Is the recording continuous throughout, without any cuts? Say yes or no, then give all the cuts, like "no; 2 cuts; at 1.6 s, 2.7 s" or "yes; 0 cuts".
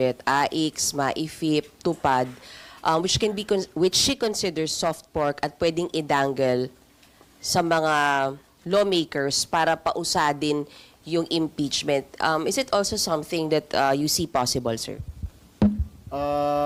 yes; 0 cuts